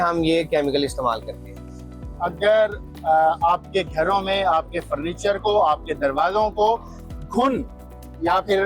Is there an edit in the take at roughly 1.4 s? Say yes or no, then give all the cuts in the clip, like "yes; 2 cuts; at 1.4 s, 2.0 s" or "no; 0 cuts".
no; 0 cuts